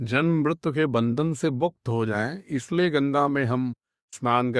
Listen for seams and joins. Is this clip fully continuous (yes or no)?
yes